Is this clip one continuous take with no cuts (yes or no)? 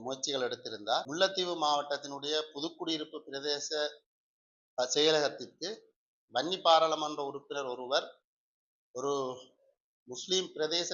no